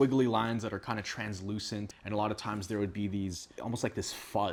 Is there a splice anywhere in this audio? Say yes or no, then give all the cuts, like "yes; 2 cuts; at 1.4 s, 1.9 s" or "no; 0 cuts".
no; 0 cuts